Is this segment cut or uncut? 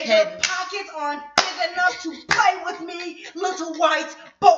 uncut